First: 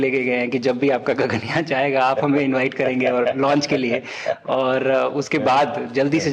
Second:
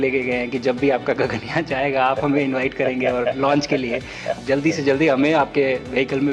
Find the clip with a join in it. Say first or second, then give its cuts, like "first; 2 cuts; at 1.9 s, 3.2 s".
second; 1 cut; at 4.4 s